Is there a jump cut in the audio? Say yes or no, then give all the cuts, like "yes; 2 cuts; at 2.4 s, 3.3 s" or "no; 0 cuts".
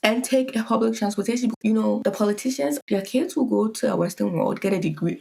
yes; 2 cuts; at 1.6 s, 2.8 s